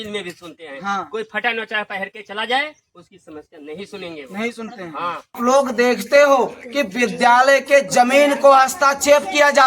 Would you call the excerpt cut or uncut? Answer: cut